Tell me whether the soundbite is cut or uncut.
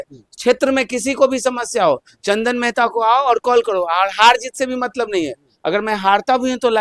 uncut